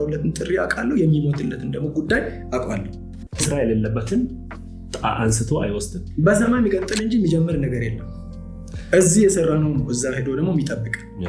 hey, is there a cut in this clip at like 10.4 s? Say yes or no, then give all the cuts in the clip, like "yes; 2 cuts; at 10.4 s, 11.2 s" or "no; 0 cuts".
no; 1 cut; at 3.4 s